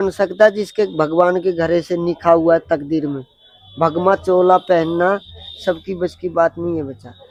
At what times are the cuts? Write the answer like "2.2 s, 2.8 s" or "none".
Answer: none